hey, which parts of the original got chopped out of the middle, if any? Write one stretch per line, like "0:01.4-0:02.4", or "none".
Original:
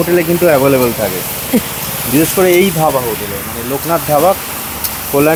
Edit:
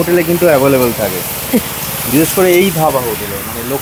none